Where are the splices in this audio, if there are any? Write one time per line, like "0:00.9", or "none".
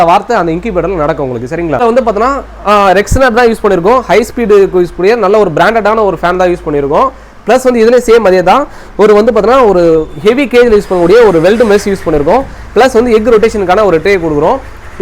none